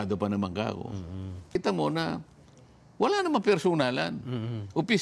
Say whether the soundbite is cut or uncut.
cut